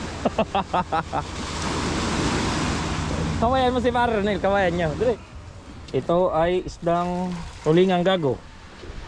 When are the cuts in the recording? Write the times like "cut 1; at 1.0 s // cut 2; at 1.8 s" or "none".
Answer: cut 1; at 5.3 s